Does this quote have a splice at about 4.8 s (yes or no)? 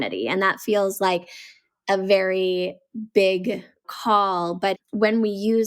yes